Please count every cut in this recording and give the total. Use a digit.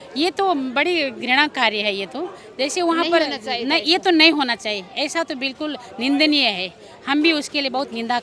0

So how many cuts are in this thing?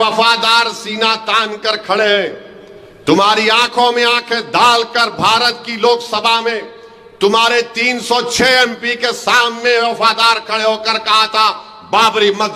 0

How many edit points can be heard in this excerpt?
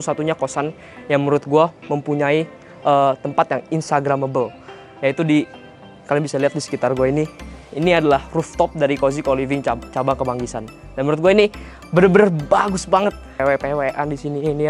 0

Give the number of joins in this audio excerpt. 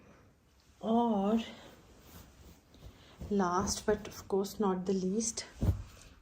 0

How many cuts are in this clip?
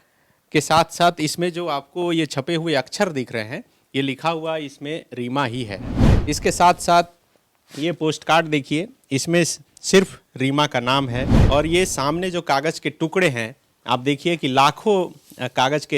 2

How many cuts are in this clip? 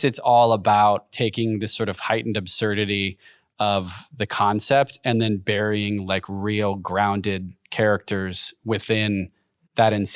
1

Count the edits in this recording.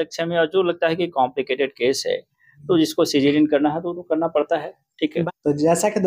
1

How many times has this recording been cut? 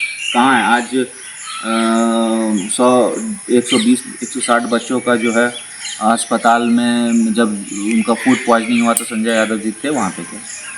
0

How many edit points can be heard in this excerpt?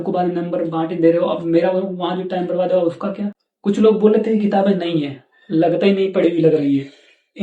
1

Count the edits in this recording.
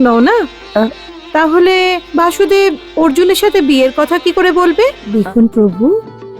1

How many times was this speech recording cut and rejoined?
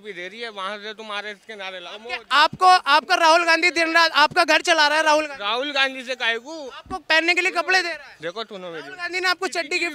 0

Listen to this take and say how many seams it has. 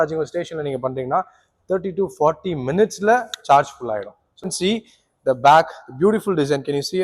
1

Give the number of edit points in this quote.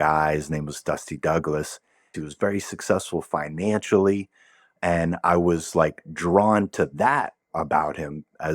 1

